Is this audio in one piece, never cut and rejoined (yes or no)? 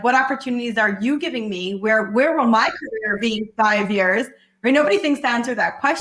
yes